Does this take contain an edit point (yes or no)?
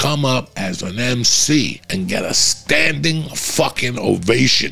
yes